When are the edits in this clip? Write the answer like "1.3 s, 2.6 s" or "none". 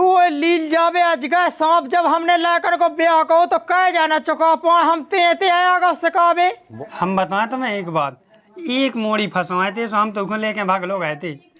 6.7 s

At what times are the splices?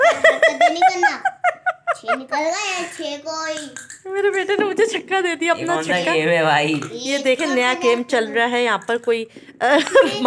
none

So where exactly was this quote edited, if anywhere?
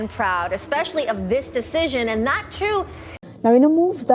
3.0 s

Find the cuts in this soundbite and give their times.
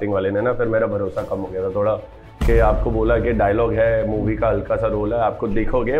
none

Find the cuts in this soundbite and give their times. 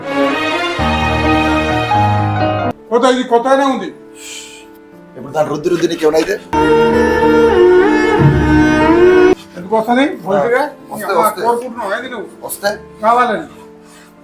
2.7 s

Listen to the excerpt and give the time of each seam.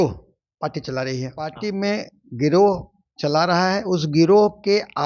1.6 s

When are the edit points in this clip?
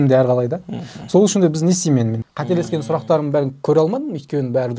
2.2 s

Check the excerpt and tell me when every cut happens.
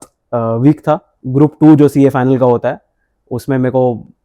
1.2 s

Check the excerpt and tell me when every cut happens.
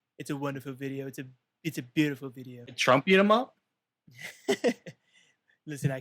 2.8 s

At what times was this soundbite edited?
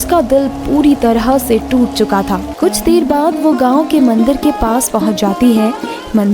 2.5 s

